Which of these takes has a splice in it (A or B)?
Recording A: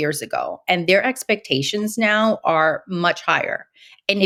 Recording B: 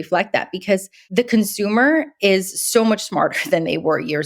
B